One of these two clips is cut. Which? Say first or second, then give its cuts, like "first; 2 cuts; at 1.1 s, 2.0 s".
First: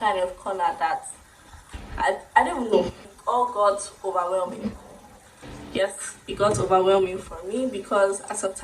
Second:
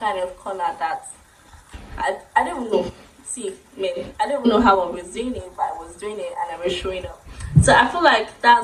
first; 1 cut; at 3.1 s